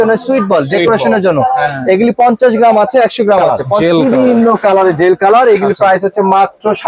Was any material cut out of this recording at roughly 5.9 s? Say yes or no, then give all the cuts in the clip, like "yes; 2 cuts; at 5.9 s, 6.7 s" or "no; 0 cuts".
no; 1 cut; at 3.7 s